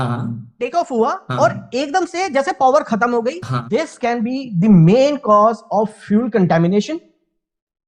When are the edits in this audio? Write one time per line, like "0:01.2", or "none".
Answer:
0:03.4